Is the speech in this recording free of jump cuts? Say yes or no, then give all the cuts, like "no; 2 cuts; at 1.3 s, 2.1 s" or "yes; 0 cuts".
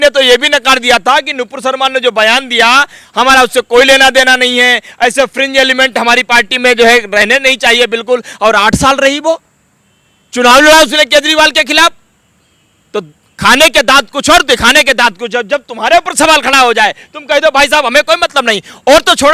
yes; 0 cuts